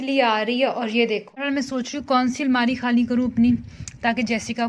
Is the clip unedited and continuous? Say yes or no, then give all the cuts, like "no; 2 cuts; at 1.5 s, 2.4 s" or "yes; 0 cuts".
no; 1 cut; at 1.4 s